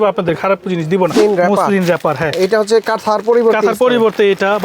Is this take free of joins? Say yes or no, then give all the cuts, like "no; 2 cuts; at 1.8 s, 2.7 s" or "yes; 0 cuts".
no; 1 cut; at 1.1 s